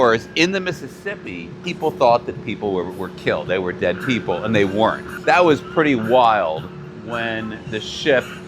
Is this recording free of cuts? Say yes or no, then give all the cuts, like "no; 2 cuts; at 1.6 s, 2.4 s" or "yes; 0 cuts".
no; 2 cuts; at 1.6 s, 5.1 s